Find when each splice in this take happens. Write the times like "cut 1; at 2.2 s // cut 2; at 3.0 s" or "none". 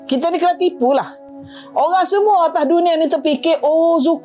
none

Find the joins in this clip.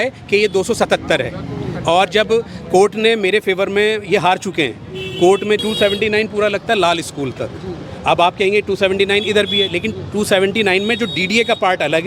cut 1; at 5.6 s

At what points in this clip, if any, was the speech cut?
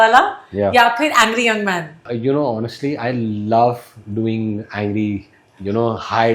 cut 1; at 2.1 s

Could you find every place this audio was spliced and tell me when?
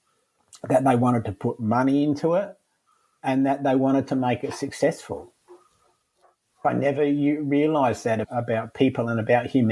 cut 1; at 6.6 s // cut 2; at 8.3 s

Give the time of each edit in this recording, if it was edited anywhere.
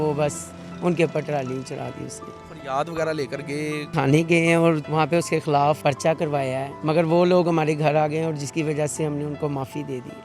cut 1; at 2.4 s // cut 2; at 3.9 s // cut 3; at 4.8 s // cut 4; at 5.8 s // cut 5; at 6.7 s

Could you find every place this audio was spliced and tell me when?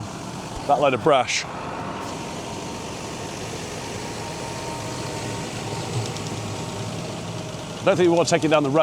none

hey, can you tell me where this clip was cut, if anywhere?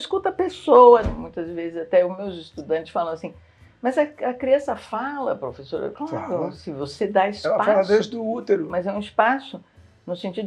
cut 1; at 1.1 s // cut 2; at 8.7 s

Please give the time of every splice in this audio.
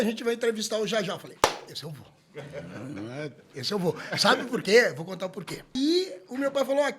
cut 1; at 5.7 s

